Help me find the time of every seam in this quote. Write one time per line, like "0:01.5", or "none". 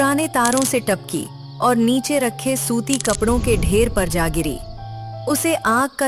none